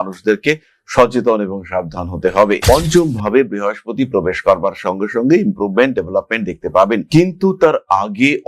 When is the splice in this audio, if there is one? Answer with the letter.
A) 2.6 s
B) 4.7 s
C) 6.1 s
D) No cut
A